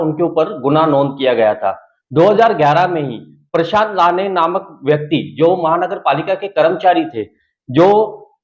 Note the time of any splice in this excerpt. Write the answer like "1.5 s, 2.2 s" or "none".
none